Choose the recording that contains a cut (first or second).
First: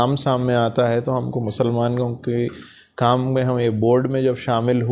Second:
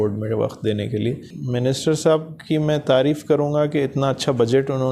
second